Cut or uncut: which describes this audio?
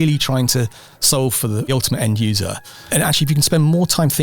cut